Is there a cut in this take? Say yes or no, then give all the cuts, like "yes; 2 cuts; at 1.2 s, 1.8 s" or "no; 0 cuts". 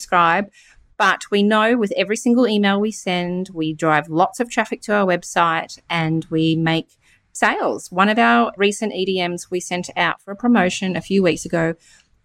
no; 0 cuts